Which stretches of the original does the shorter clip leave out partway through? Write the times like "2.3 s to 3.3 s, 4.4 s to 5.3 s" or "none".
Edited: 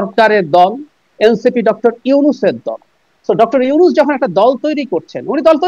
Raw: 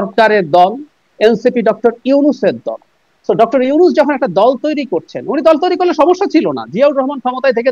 none